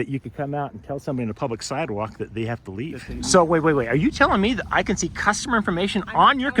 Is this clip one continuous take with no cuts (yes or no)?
no